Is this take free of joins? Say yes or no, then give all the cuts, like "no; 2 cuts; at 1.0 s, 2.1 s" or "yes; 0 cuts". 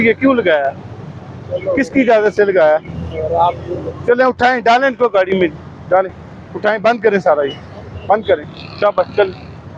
yes; 0 cuts